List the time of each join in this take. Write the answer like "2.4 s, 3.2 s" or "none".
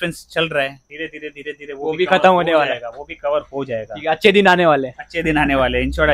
none